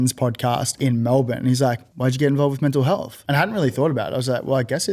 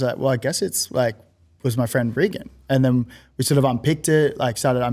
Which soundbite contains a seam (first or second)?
first